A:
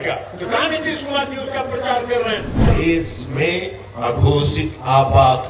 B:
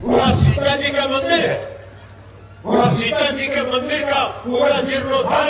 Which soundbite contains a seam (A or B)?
A